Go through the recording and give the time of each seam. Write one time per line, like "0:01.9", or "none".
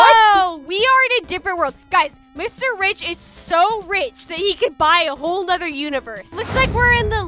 0:06.4